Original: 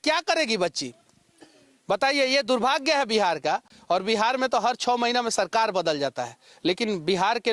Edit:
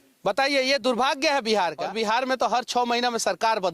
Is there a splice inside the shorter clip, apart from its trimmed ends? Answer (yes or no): yes